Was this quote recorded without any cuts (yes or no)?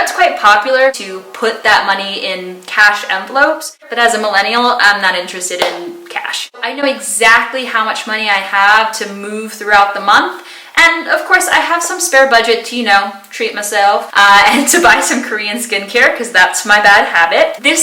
no